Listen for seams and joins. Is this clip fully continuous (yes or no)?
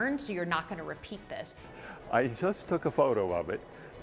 no